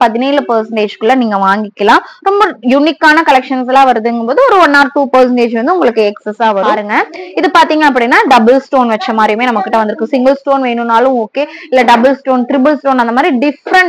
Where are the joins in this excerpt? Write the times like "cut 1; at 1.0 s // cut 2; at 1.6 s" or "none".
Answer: cut 1; at 6.8 s